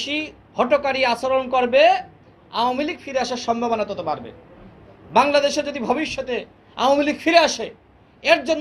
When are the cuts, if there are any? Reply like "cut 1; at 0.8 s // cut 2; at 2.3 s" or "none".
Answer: none